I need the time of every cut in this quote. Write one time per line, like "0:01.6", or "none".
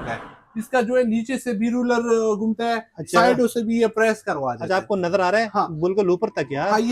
none